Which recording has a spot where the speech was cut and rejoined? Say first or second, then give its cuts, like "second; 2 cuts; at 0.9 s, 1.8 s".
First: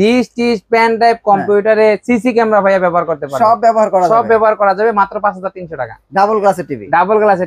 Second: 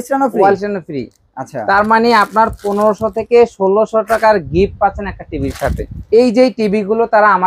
second; 1 cut; at 6.0 s